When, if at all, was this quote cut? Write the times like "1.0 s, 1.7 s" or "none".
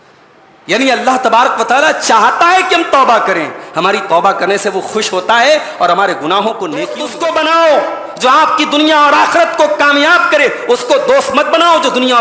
7.0 s